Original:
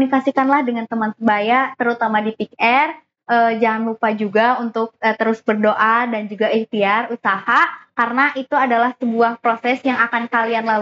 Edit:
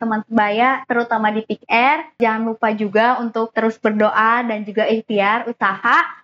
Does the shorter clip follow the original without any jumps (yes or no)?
no